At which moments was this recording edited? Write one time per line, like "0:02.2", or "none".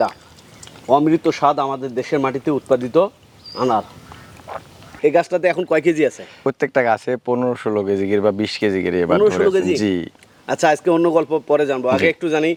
none